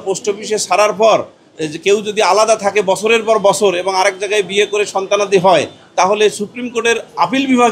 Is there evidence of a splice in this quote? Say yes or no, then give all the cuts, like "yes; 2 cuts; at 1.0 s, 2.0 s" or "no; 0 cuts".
no; 0 cuts